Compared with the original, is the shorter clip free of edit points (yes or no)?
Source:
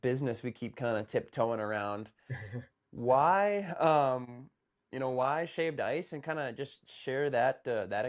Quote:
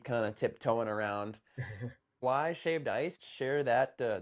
no